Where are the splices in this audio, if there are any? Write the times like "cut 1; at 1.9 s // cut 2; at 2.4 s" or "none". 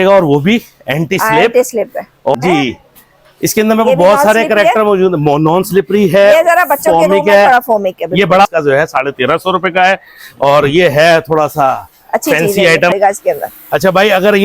cut 1; at 2.3 s // cut 2; at 8.5 s // cut 3; at 12.9 s